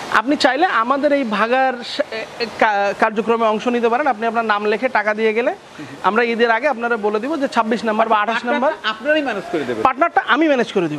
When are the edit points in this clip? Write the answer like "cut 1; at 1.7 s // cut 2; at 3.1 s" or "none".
none